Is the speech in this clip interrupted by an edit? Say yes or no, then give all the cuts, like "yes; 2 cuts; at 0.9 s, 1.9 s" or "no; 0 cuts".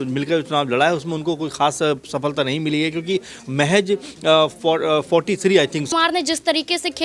yes; 1 cut; at 5.9 s